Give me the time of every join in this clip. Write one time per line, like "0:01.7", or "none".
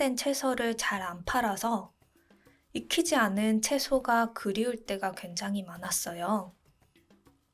0:06.7